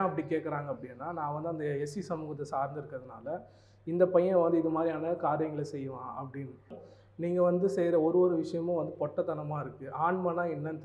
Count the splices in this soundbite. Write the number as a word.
one